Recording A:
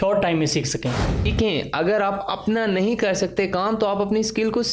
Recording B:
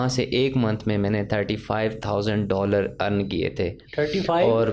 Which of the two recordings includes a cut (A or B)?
A